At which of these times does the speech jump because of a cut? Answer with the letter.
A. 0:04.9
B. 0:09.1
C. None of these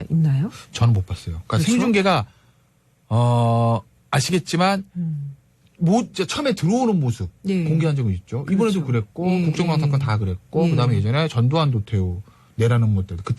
B